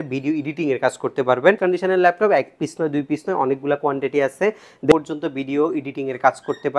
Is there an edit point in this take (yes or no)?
yes